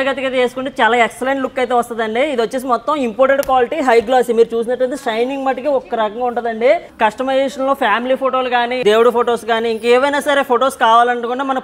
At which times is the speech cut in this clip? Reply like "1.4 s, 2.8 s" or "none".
6.9 s, 8.8 s